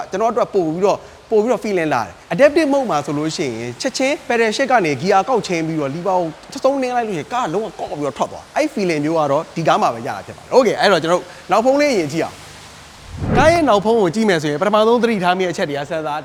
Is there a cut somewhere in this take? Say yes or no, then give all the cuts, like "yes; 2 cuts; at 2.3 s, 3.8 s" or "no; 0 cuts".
no; 0 cuts